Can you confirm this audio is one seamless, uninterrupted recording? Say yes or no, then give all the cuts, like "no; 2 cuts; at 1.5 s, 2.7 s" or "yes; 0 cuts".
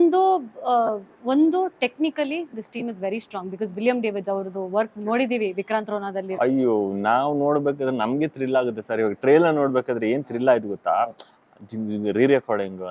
no; 1 cut; at 6.3 s